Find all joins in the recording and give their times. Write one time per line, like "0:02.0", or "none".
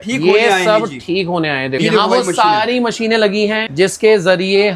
0:01.9
0:03.7